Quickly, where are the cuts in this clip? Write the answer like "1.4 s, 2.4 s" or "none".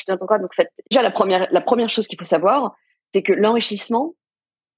0.9 s